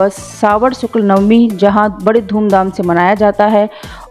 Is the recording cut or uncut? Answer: uncut